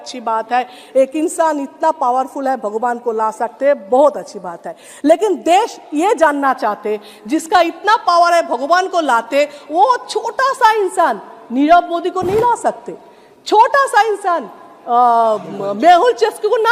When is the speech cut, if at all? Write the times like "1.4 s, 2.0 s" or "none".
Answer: none